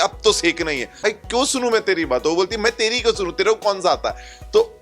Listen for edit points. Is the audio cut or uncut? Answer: cut